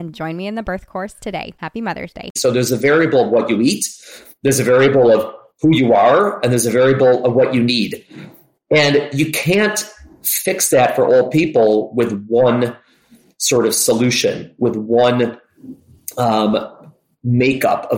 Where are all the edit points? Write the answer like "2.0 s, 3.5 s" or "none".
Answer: 2.4 s